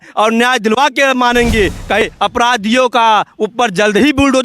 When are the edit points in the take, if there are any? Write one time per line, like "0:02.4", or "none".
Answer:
0:02.0